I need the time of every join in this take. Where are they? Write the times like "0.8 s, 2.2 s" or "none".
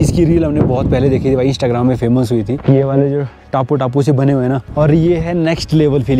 4.7 s